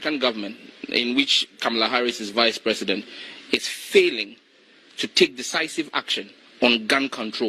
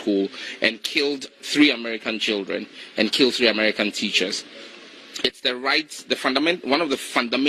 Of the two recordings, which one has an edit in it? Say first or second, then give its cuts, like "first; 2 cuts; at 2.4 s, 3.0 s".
second; 1 cut; at 2.8 s